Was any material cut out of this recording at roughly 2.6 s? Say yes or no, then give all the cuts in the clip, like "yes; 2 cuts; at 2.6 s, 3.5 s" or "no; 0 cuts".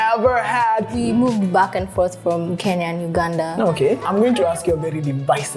no; 2 cuts; at 0.9 s, 4.0 s